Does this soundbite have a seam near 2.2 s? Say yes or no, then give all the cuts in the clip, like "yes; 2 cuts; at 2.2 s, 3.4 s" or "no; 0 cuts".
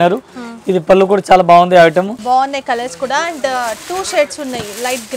yes; 1 cut; at 2.2 s